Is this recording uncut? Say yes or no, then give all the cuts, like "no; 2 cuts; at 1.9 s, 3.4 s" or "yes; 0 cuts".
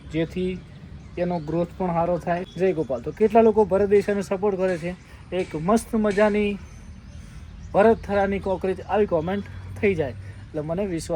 no; 1 cut; at 2.5 s